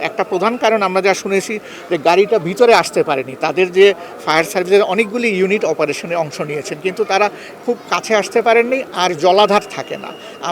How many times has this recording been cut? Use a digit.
0